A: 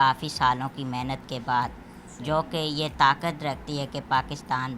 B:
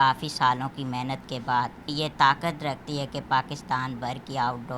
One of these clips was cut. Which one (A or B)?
B